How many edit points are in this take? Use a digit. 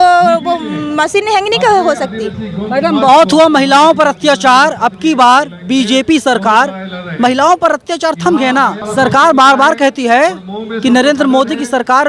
0